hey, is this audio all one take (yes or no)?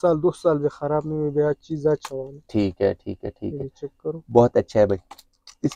yes